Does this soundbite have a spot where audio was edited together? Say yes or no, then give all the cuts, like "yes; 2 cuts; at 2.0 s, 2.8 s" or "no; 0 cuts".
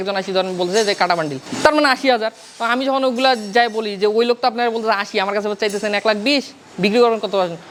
no; 0 cuts